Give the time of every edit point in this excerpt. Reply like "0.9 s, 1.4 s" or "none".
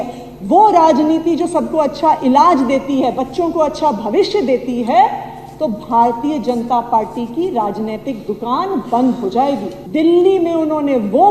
9.8 s